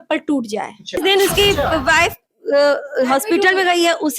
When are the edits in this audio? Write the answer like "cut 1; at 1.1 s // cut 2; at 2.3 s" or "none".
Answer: cut 1; at 1.0 s